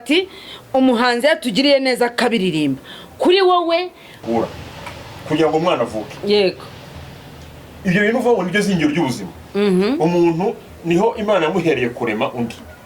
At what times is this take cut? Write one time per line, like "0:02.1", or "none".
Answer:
0:04.2